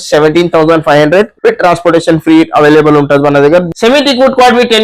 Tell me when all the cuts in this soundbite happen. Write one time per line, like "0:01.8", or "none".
0:01.3
0:03.7